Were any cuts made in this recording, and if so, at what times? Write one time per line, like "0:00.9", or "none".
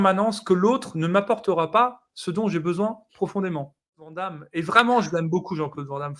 0:04.2